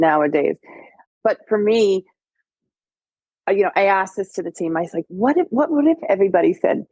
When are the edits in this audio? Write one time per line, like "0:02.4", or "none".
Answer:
0:01.1